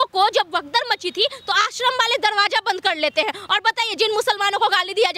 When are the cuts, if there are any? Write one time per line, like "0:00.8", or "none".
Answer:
none